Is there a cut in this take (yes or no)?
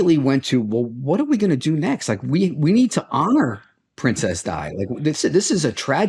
no